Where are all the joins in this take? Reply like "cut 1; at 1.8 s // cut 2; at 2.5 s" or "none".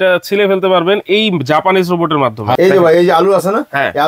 cut 1; at 2.6 s